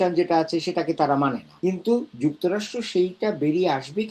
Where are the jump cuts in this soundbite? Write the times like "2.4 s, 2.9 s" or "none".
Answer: 1.5 s